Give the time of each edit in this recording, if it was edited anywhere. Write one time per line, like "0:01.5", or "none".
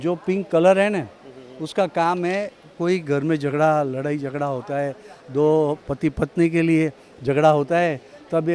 none